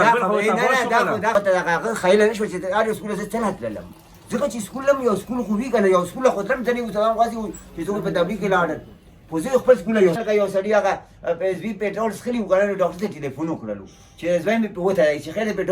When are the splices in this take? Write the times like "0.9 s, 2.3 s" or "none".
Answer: 1.4 s, 10.2 s